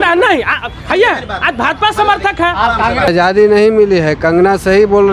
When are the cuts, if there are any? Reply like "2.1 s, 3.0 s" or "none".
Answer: 3.1 s